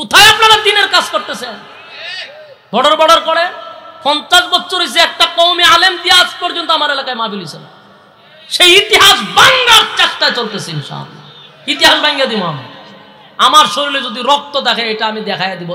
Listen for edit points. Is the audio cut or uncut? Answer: uncut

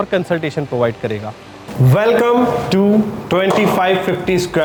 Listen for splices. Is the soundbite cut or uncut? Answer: uncut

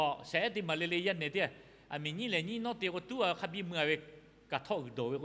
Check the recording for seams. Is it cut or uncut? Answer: uncut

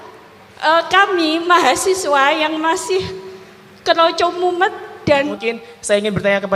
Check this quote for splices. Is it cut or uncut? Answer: cut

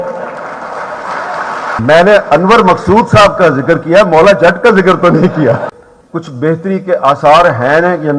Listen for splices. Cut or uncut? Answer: cut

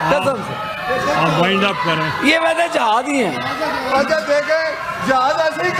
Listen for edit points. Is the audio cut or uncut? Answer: uncut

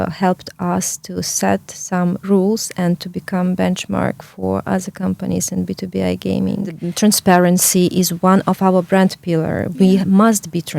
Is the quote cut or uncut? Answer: cut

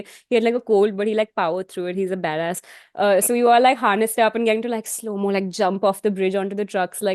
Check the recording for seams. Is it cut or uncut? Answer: uncut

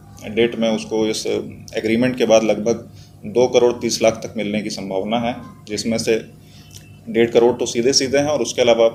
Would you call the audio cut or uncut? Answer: uncut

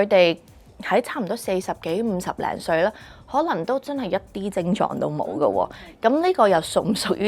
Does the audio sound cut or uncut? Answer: uncut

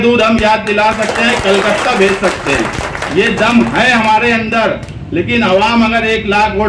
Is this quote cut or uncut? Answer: uncut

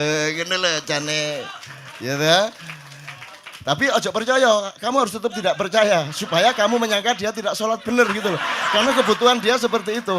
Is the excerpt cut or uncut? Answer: uncut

